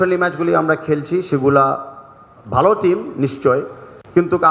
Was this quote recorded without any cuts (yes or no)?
yes